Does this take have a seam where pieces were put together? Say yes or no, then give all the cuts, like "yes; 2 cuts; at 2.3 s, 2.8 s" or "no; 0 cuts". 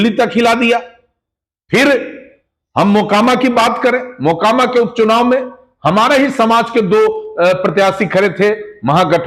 no; 0 cuts